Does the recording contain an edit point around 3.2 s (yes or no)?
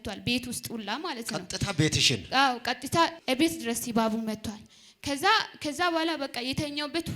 yes